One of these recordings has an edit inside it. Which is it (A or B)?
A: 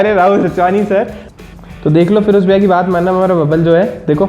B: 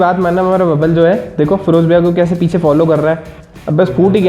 A